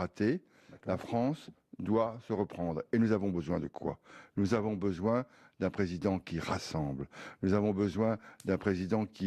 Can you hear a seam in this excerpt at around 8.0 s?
yes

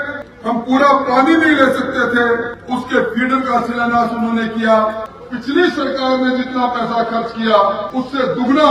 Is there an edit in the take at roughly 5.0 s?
yes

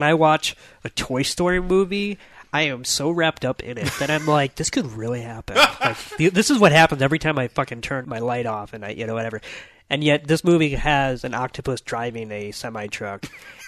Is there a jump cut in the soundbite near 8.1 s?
yes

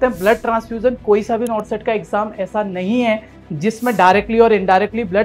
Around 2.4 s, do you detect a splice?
no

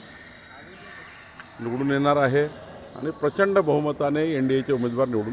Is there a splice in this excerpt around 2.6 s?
no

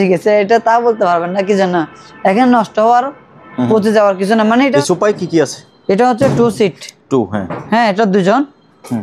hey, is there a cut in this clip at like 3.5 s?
no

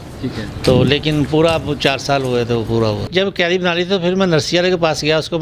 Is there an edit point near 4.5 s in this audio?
no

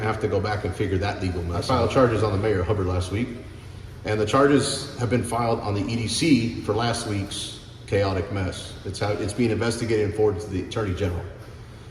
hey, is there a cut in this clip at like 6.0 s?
no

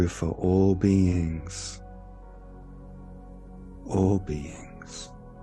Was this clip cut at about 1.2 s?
no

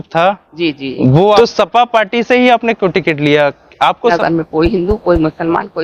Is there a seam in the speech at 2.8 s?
no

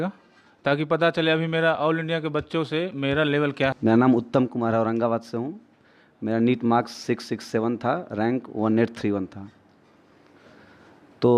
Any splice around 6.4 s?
no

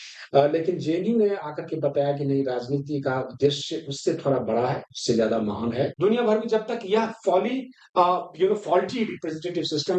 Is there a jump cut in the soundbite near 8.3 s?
no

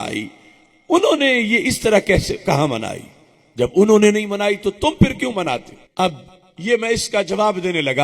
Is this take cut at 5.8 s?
yes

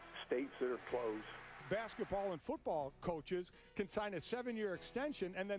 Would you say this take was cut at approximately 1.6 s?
yes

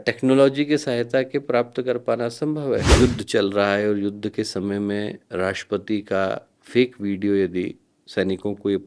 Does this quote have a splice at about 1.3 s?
no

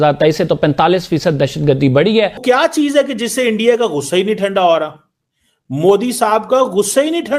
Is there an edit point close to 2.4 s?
yes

